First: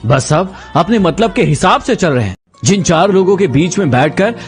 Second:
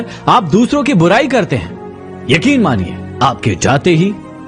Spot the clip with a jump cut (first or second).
first